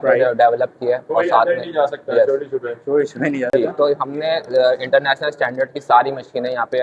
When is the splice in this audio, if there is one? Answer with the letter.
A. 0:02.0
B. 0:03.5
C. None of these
B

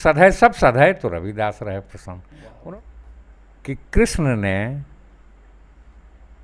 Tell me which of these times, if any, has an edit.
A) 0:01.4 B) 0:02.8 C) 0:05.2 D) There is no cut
B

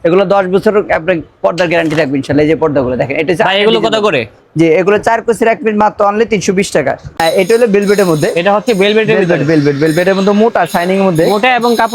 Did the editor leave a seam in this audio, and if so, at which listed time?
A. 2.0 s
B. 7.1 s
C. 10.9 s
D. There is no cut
B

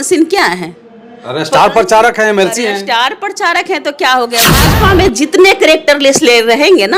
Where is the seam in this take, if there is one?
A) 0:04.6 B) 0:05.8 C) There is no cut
A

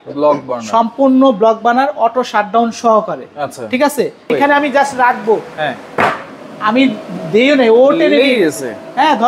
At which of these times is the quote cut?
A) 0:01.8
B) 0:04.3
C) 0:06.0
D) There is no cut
B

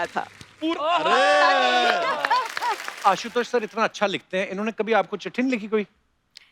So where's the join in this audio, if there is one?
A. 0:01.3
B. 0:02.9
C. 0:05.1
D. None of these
B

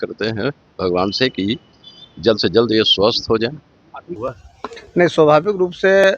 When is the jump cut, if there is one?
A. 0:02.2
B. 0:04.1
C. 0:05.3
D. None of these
B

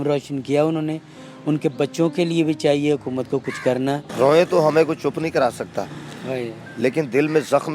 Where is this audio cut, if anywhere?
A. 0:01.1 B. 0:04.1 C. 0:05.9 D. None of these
B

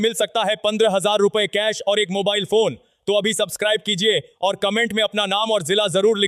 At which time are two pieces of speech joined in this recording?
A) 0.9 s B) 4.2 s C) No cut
C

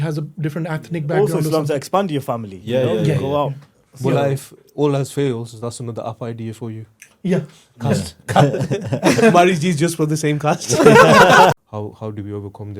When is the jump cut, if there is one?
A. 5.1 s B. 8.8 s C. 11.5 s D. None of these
C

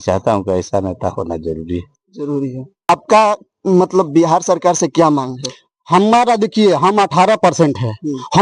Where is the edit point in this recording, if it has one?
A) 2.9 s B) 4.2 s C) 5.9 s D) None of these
A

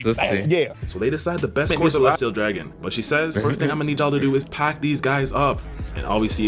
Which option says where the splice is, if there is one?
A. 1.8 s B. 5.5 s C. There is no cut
A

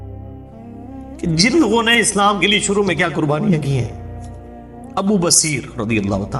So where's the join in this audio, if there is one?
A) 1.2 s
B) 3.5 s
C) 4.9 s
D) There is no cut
A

